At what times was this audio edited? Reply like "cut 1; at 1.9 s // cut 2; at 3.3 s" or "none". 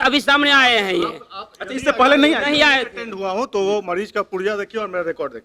none